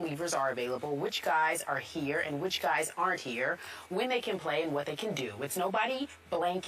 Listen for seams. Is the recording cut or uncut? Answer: uncut